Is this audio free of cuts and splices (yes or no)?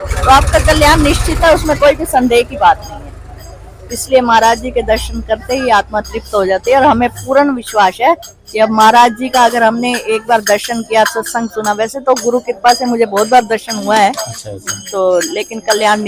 yes